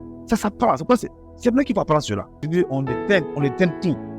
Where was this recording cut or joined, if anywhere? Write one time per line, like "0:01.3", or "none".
0:02.5